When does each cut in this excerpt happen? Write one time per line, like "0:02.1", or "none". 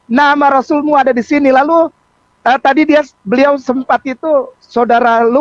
none